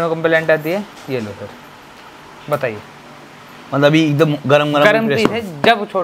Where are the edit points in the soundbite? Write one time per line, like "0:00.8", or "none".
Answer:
none